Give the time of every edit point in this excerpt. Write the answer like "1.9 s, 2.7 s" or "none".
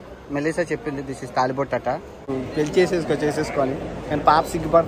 2.3 s